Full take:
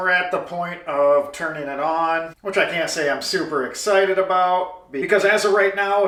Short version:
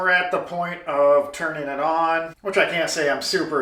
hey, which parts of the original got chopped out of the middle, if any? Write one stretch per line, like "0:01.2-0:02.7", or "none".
none